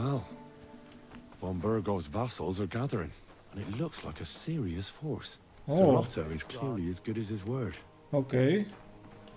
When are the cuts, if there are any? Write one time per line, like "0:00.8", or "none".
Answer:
none

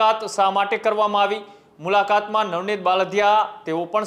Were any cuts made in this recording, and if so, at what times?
none

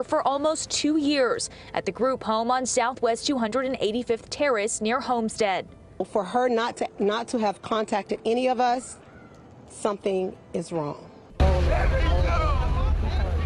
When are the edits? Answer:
0:11.2

